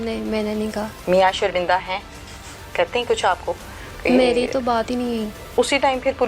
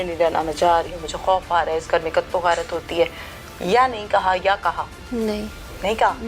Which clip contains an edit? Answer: first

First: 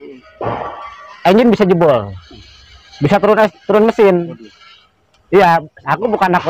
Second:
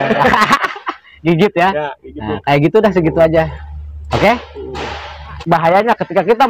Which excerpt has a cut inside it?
second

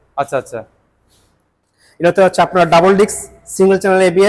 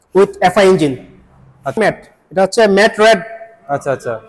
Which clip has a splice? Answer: second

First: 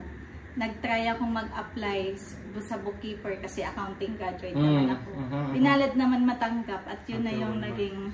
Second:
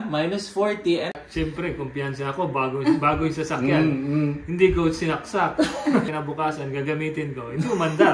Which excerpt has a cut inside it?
second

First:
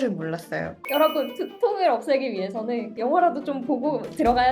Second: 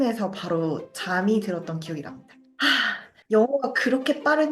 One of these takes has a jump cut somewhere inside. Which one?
second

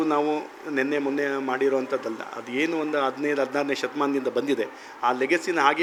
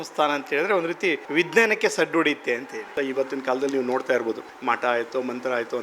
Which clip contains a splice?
second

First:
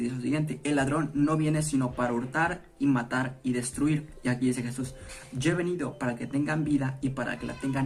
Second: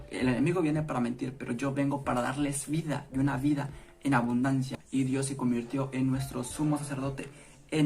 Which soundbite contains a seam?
second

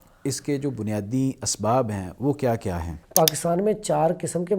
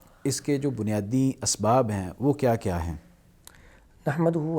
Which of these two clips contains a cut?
first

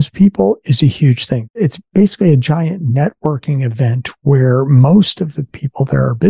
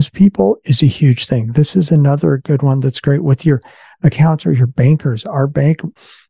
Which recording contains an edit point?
first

